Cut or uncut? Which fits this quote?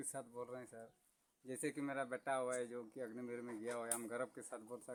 uncut